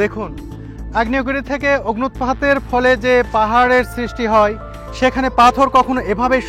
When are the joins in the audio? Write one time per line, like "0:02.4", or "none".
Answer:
none